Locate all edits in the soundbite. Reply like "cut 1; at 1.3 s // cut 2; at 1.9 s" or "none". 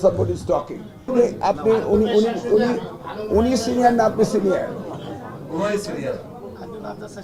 cut 1; at 1.1 s